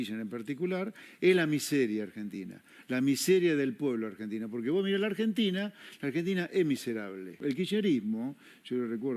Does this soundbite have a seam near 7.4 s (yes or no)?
yes